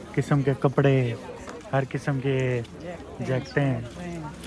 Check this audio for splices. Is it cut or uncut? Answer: uncut